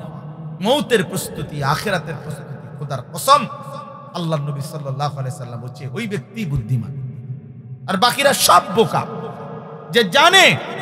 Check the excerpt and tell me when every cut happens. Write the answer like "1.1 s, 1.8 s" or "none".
none